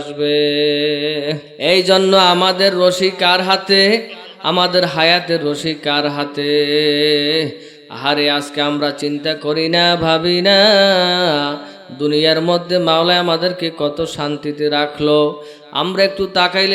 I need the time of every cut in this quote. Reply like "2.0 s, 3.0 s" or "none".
1.5 s